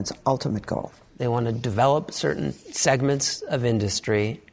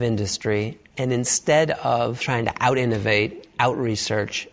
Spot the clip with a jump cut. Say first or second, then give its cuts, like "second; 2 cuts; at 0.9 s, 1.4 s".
second; 1 cut; at 2.2 s